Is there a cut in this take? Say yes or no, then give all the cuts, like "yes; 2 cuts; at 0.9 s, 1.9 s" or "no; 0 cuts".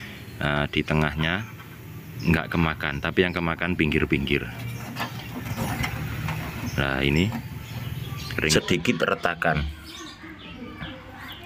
yes; 1 cut; at 8.5 s